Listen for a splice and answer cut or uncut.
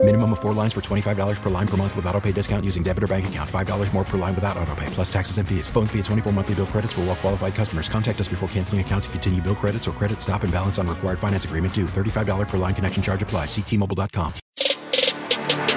cut